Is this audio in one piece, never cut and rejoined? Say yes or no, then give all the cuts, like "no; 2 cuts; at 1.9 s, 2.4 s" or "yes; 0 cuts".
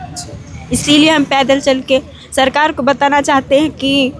yes; 0 cuts